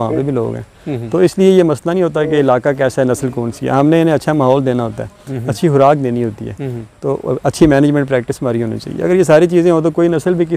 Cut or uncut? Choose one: uncut